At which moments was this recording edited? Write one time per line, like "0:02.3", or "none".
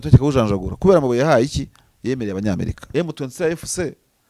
0:02.8